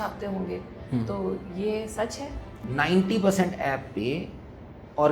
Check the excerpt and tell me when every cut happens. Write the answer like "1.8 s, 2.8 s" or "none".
2.6 s

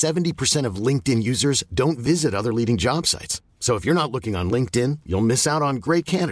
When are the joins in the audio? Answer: none

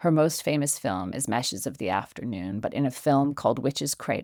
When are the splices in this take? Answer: none

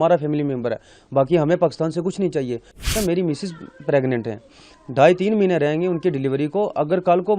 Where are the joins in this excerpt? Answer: 2.9 s

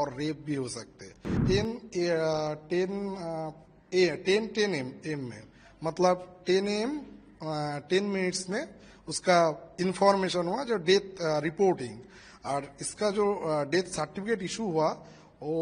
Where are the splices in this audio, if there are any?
1.3 s

